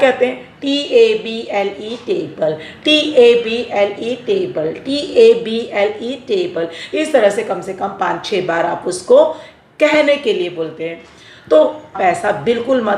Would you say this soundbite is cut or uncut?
cut